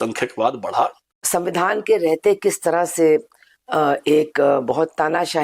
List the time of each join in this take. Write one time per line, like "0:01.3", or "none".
0:01.2